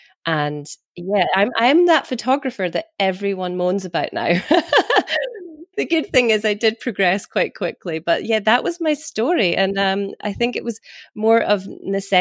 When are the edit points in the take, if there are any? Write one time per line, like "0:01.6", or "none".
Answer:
0:01.1
0:05.2